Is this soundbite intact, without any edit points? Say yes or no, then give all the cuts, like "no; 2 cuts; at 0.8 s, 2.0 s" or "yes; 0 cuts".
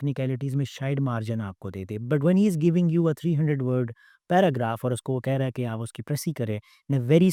yes; 0 cuts